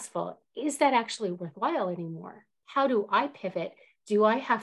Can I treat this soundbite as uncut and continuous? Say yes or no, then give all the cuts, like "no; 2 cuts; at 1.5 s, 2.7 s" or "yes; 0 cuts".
no; 1 cut; at 2.5 s